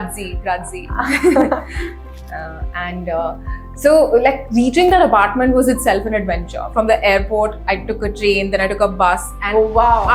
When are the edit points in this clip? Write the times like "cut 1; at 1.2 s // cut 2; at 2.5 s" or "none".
none